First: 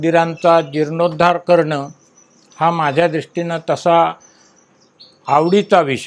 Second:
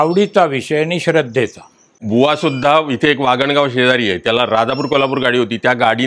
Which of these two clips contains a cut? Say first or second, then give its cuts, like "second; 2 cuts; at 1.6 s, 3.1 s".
second; 1 cut; at 2.0 s